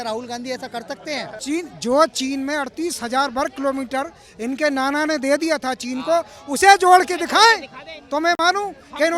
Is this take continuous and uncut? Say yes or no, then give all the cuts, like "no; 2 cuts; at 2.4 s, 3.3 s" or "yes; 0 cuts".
no; 1 cut; at 1.3 s